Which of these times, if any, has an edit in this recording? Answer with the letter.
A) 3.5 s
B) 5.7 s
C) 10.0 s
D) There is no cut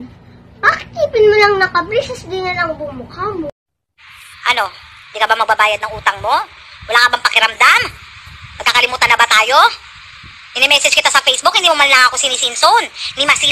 A